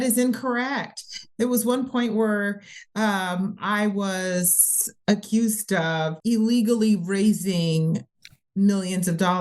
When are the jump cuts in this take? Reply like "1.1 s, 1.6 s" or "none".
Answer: 6.2 s